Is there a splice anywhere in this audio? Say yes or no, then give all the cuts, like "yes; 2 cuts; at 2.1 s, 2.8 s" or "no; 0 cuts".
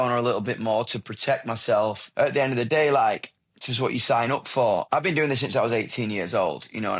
yes; 2 cuts; at 2.0 s, 4.9 s